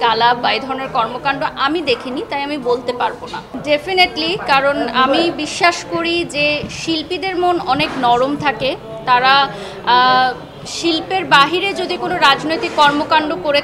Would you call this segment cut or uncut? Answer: uncut